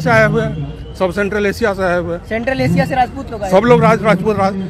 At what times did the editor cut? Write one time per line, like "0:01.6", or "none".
none